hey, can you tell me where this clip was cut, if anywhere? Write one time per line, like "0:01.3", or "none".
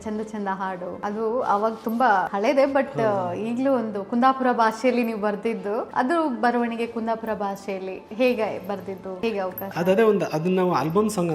0:01.0
0:02.3
0:05.9
0:09.0